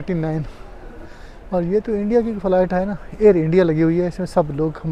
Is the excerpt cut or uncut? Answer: uncut